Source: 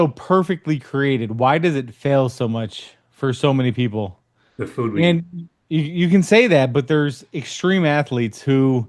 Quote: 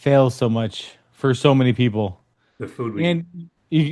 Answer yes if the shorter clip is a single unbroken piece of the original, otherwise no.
yes